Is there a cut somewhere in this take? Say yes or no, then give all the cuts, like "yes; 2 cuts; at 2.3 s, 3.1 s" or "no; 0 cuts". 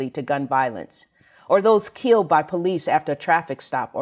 no; 0 cuts